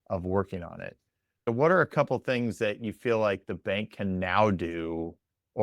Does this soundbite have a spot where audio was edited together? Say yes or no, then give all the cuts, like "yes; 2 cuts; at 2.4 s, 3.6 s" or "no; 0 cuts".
yes; 1 cut; at 1.5 s